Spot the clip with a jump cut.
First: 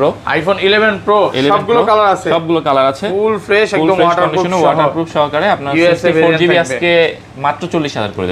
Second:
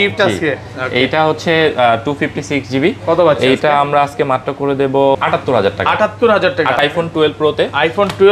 second; 2 cuts; at 5.1 s, 6.8 s

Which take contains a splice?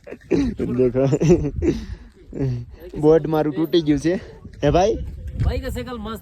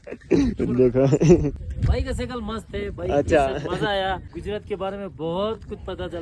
second; 2 cuts; at 1.6 s, 4.3 s

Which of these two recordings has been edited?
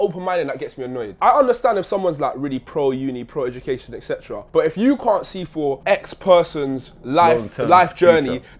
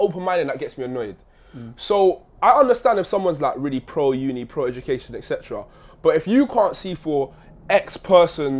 first; 3 cuts; at 1.1 s, 4.3 s, 5.8 s

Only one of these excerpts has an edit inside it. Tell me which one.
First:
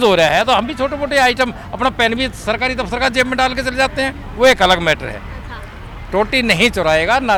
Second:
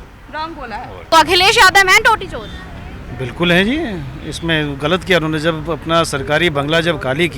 second; 1 cut; at 1.1 s

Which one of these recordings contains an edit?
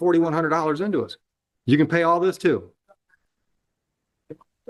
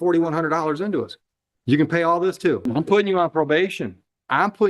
second; 1 cut; at 2.6 s

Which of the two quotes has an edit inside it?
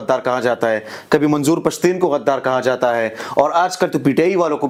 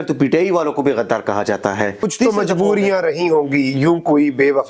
second; 1 cut; at 2.1 s

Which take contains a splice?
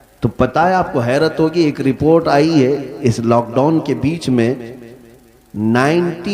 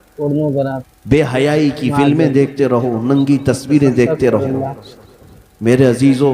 second; 1 cut; at 0.9 s

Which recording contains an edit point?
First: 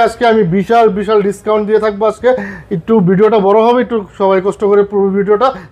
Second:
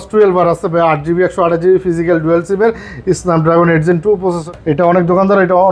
second; 1 cut; at 4.4 s

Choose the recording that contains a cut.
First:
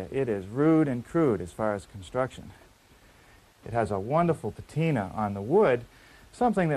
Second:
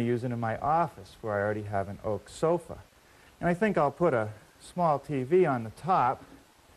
first; 1 cut; at 1.9 s

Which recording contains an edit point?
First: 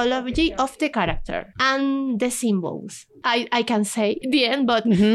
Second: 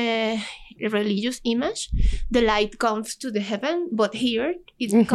first; 3 cuts; at 1.5 s, 3.2 s, 4.2 s

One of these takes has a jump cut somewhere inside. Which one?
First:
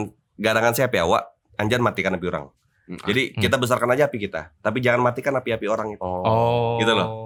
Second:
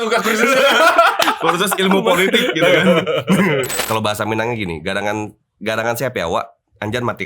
second; 1 cut; at 3.7 s

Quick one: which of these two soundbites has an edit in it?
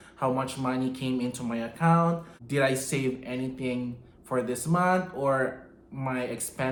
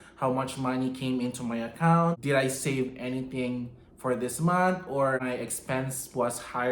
second; 2 cuts; at 2.2 s, 5.2 s

